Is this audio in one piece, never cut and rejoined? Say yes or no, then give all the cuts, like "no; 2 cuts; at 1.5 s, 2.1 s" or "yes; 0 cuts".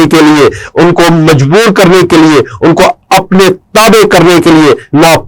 yes; 0 cuts